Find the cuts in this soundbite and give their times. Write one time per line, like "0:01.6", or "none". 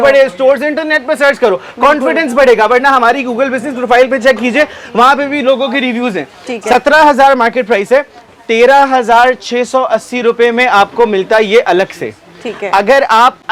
none